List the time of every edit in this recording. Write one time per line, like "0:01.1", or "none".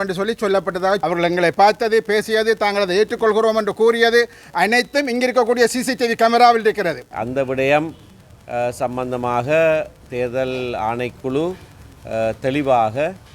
0:01.0
0:07.1